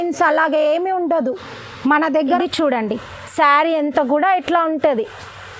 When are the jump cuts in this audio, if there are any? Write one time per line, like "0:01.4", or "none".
0:02.4